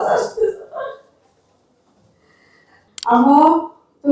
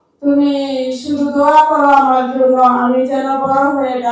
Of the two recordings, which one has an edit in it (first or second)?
first